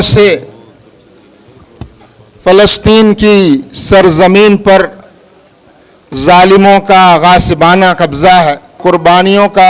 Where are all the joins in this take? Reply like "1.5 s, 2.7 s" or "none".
8.8 s